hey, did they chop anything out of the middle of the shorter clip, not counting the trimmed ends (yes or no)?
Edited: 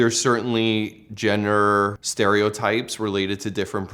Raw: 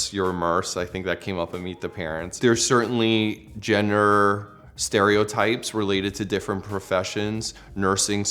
yes